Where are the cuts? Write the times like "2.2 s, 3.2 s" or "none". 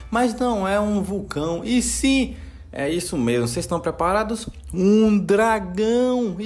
none